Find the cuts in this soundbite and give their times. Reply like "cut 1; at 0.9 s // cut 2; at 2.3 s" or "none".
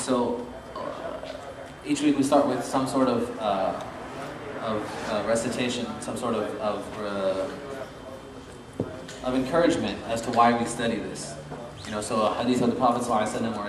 cut 1; at 2.3 s